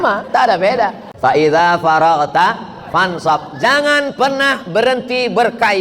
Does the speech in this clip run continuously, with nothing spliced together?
no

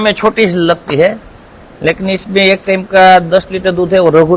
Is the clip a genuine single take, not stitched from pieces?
yes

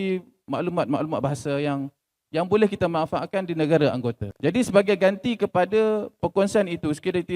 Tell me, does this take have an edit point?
yes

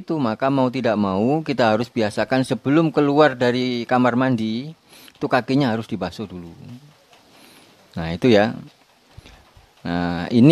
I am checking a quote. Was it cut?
no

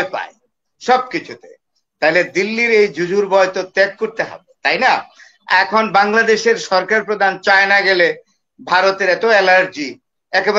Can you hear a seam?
no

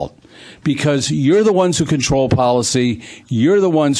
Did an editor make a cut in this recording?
no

